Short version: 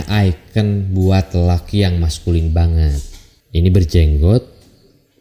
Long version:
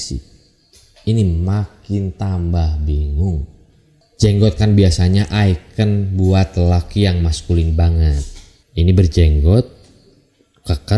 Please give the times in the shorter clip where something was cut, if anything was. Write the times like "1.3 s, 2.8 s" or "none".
none